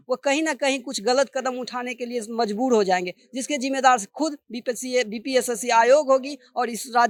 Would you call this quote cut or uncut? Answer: uncut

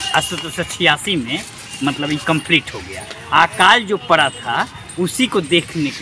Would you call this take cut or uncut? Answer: uncut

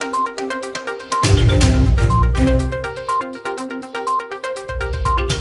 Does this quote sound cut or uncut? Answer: uncut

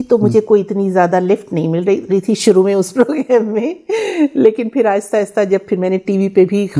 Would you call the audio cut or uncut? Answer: uncut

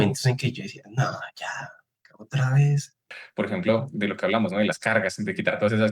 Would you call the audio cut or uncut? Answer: cut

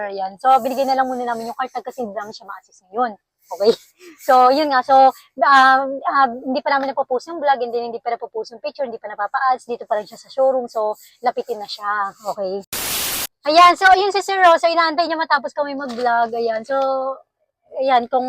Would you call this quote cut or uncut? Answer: cut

